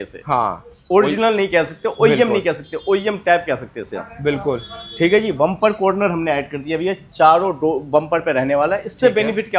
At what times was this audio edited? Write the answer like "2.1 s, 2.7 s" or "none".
none